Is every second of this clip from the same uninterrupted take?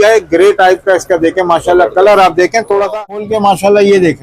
no; 1 cut; at 3.2 s

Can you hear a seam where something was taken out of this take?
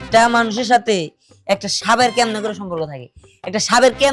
no; 0 cuts

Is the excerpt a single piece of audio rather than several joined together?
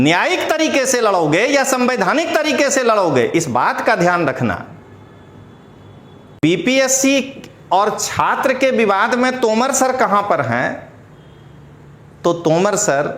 no; 1 cut; at 6.4 s

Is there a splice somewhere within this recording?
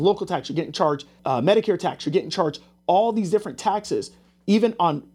yes; 1 cut; at 1.1 s

